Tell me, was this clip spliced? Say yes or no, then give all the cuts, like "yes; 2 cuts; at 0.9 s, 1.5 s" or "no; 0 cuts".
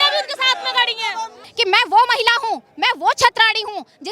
yes; 1 cut; at 1.4 s